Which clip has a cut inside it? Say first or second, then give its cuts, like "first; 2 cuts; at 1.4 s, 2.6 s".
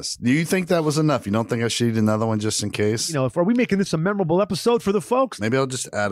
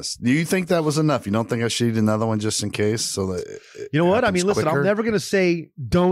first; 2 cuts; at 3.1 s, 5.3 s